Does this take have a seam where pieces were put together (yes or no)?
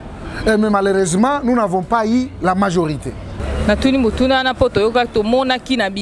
yes